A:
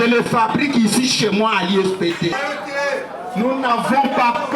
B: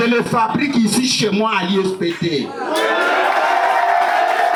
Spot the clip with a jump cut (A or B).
A